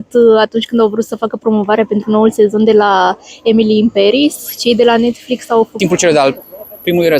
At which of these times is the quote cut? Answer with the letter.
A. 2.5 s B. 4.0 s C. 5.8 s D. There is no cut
C